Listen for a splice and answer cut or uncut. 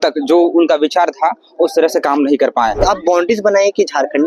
cut